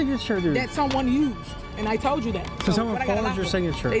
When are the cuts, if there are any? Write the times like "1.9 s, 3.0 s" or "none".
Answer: none